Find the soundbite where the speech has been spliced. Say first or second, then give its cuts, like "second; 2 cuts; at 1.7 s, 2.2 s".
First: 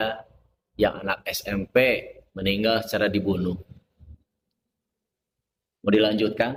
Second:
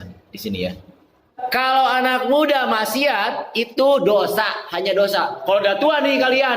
second; 1 cut; at 1.4 s